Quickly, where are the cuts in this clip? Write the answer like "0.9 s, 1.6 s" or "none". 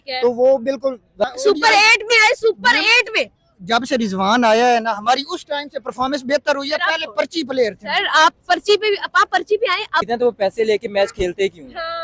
1.2 s, 10.1 s